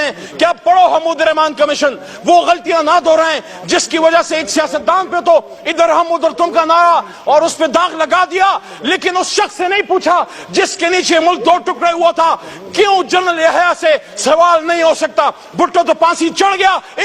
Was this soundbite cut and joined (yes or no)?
no